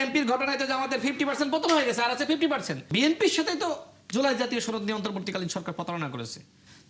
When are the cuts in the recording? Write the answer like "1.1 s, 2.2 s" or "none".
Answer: 2.9 s

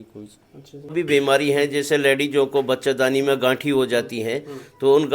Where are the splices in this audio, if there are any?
0.9 s

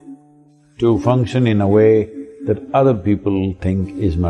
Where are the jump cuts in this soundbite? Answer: none

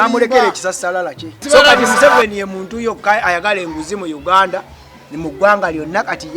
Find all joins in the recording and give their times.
1.4 s

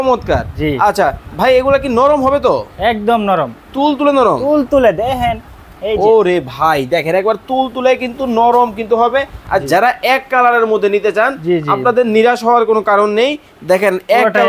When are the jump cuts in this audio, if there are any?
9.4 s

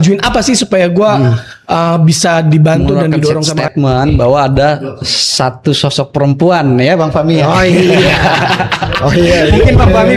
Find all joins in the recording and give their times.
3.6 s

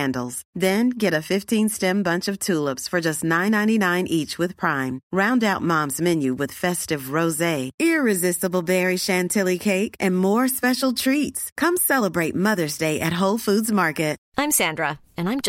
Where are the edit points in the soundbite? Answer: 14.2 s

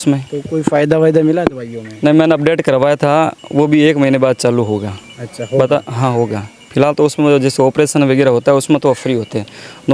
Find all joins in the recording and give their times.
none

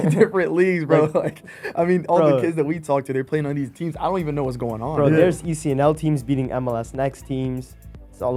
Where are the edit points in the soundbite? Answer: none

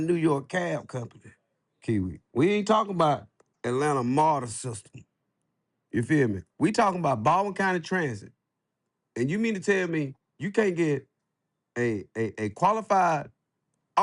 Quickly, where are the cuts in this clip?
3.5 s

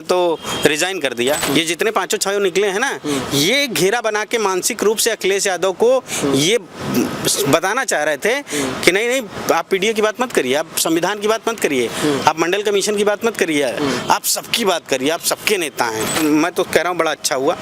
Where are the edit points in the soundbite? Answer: 1.4 s, 16.2 s

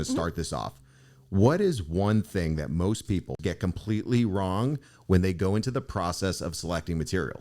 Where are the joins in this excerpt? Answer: 3.4 s

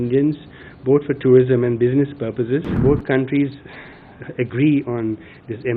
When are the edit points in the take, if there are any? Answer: 2.7 s

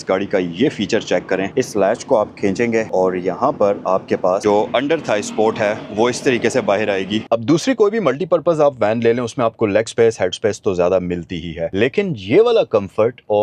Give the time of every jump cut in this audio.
1.5 s, 4.4 s, 7.2 s, 11.6 s

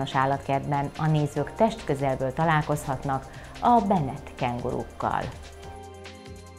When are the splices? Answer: 5.4 s

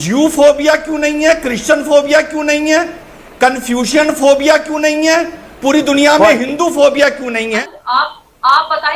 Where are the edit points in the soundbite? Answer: 7.6 s

